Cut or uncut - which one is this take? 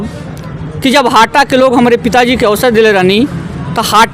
uncut